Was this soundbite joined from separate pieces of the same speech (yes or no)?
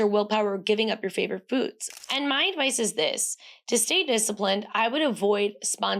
yes